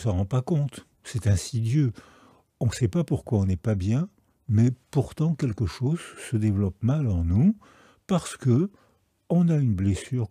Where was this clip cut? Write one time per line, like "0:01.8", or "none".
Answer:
none